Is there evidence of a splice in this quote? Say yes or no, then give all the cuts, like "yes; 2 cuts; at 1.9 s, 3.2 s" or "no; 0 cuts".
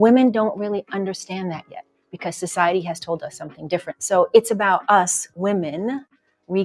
yes; 2 cuts; at 1.7 s, 3.9 s